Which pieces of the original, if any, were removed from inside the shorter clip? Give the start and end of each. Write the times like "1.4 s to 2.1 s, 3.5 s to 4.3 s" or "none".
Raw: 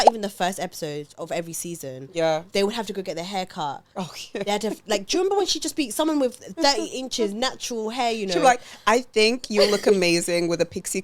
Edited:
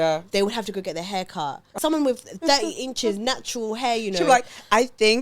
4.0 s to 5.9 s